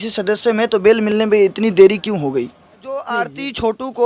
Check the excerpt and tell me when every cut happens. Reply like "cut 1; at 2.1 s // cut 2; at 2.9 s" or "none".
cut 1; at 2.9 s

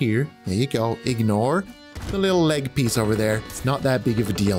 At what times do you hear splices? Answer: none

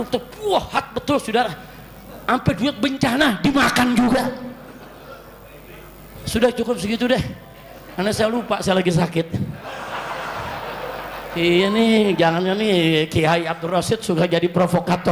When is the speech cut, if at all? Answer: none

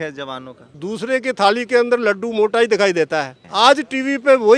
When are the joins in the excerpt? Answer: cut 1; at 0.8 s // cut 2; at 3.4 s

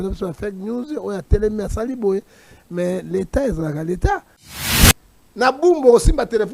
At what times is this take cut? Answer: cut 1; at 4.7 s

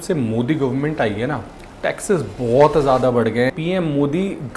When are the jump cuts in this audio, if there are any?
cut 1; at 3.6 s

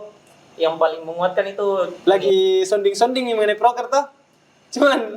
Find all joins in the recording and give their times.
cut 1; at 1.9 s

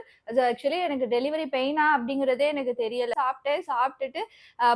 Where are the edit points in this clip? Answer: cut 1; at 3.1 s

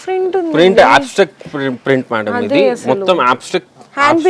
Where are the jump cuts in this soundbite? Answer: none

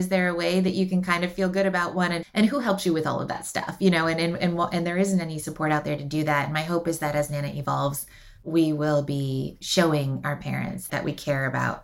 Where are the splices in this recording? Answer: cut 1; at 2.2 s // cut 2; at 10.8 s

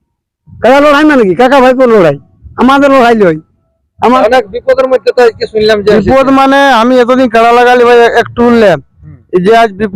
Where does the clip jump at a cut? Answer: cut 1; at 4.0 s

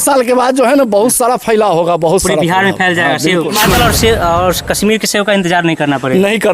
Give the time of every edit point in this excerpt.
cut 1; at 3.5 s

